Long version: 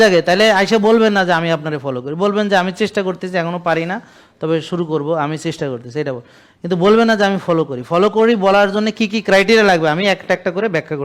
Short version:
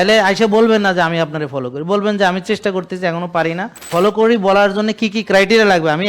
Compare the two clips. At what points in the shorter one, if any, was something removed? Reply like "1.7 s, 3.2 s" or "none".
3.8 s